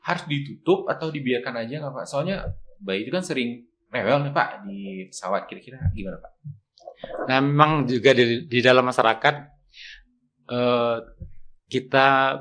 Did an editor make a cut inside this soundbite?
no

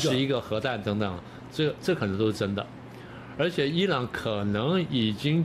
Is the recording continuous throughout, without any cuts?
yes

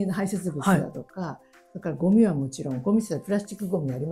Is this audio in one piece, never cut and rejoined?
yes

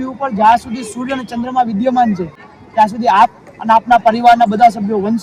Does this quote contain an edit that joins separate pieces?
yes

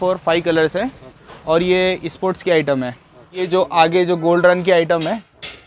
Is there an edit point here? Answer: yes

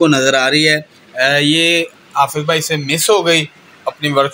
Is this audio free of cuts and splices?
yes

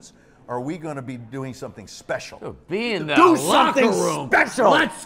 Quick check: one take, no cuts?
yes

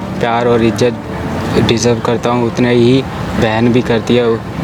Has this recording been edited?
no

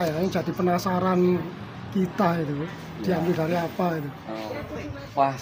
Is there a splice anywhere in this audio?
no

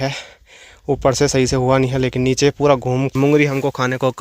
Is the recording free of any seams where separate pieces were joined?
no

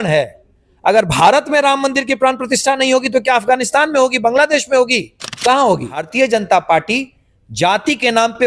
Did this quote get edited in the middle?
yes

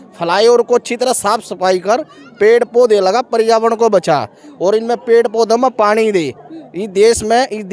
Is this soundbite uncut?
yes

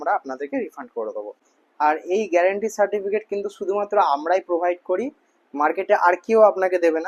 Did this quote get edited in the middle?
no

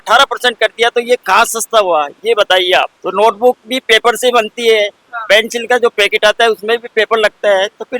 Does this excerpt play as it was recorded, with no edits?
yes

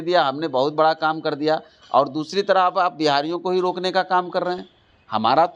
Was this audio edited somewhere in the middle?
no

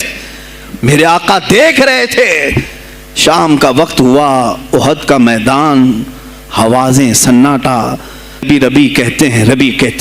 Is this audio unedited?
no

